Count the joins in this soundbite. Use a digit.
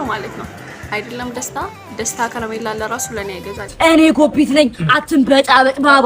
1